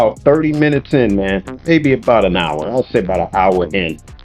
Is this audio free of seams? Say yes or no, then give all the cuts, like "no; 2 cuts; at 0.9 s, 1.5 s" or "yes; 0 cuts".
no; 1 cut; at 1.5 s